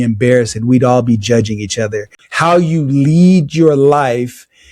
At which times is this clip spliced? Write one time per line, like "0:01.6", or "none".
0:02.2